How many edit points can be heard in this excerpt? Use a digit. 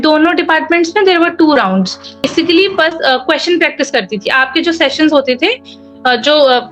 1